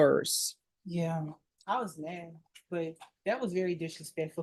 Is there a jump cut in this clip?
no; 0 cuts

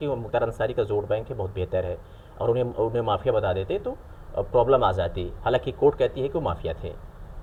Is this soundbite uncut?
yes; 0 cuts

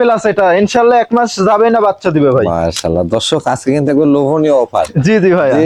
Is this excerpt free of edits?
yes; 0 cuts

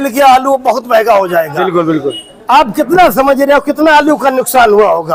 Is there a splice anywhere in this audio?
no; 0 cuts

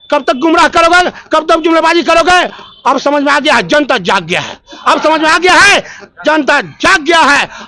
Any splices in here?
no; 0 cuts

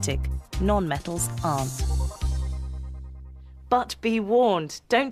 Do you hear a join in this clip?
no; 0 cuts

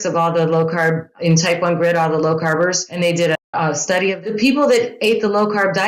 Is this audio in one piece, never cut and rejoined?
no; 3 cuts; at 1.1 s, 2.9 s, 4.3 s

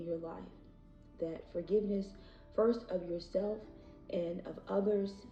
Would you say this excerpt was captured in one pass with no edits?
yes; 0 cuts

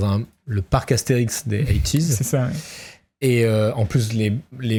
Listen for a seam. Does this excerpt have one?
no; 0 cuts

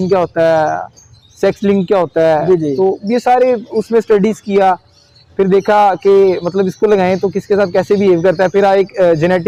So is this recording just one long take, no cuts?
yes; 0 cuts

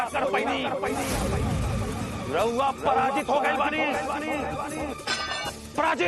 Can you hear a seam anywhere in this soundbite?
no; 0 cuts

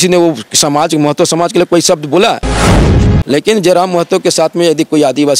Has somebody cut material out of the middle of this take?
yes; 1 cut; at 2.8 s

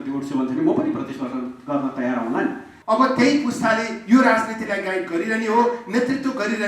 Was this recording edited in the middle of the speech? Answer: yes; 1 cut; at 2.7 s

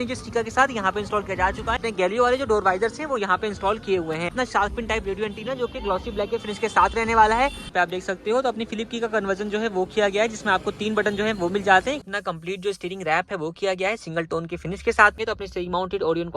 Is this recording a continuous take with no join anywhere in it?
no; 5 cuts; at 1.8 s, 4.4 s, 7.6 s, 12.0 s, 15.2 s

